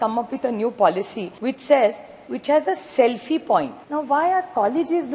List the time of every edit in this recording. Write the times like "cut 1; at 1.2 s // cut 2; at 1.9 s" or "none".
cut 1; at 1.2 s // cut 2; at 3.8 s